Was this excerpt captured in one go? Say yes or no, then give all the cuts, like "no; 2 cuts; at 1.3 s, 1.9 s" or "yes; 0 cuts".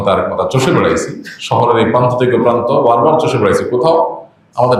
yes; 0 cuts